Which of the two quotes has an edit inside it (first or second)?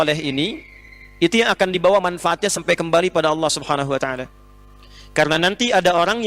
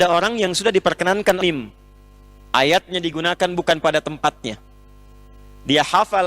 second